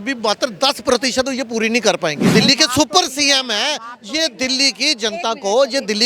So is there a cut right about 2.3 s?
yes; 1 cut; at 2.3 s

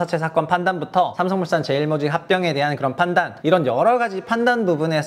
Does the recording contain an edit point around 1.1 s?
yes; 2 cuts; at 1.1 s, 3.3 s

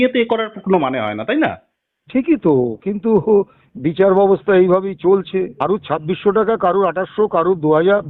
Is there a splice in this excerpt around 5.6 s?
yes; 1 cut; at 5.6 s

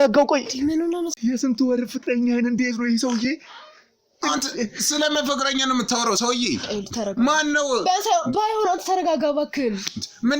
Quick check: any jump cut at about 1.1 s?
yes; 1 cut; at 1.1 s

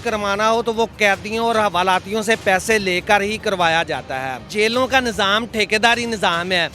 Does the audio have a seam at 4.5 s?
yes; 1 cut; at 4.5 s

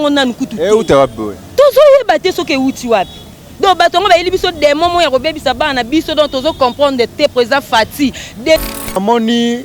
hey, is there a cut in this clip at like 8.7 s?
yes; 1 cut; at 8.7 s

